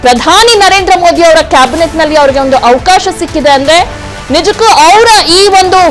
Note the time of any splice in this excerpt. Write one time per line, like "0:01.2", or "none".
0:04.1